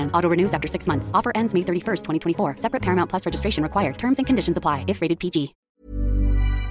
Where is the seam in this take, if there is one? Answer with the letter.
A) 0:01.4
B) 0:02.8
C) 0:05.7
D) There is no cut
C